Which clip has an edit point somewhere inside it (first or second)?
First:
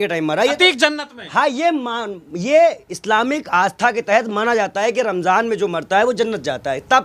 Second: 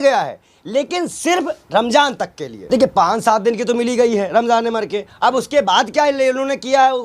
second